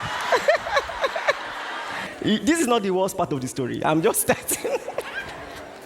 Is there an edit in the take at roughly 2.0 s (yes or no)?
yes